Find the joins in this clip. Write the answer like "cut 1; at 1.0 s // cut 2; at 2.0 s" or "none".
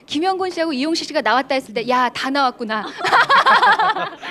none